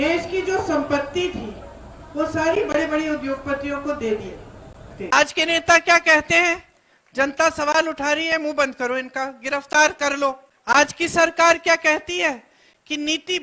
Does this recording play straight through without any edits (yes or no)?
no